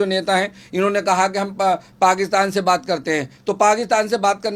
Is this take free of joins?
yes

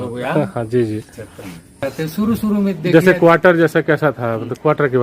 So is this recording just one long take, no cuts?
no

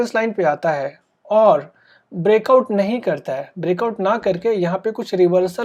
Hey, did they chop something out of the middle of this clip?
no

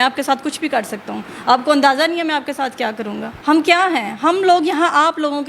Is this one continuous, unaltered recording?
no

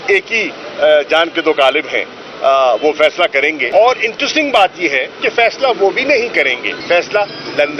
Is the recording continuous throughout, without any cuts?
no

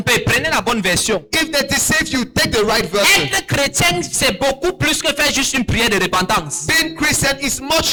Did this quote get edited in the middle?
no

